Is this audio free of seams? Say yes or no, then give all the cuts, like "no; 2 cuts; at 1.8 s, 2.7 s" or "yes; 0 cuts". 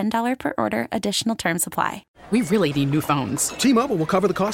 no; 1 cut; at 2.0 s